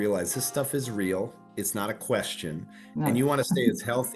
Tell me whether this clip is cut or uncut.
uncut